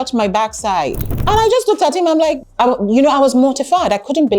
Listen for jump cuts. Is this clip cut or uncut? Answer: cut